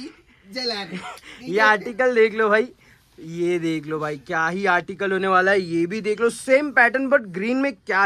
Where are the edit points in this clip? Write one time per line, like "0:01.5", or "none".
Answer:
none